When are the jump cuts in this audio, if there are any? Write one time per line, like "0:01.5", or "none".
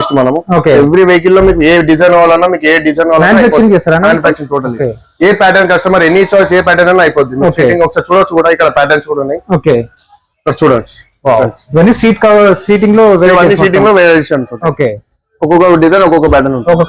none